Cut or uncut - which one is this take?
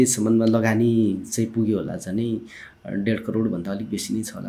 uncut